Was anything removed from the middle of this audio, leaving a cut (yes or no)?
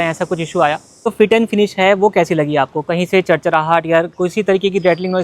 yes